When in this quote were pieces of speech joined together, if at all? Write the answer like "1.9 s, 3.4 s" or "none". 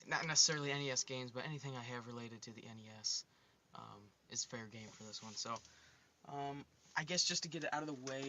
4.3 s